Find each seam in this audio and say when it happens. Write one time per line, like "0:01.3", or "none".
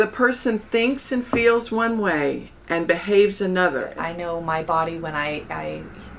0:03.9